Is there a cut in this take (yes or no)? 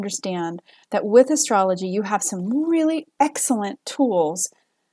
yes